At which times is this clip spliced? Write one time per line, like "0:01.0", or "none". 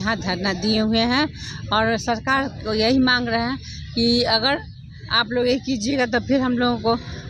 none